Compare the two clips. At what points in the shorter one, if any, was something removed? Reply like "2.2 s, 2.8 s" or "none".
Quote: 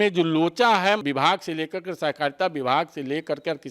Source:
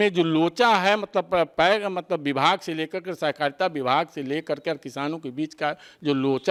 1.0 s